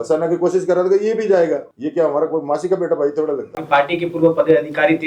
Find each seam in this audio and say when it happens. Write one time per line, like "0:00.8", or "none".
0:01.8
0:03.6